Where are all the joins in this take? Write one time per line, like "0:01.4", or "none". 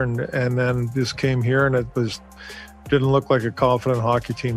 none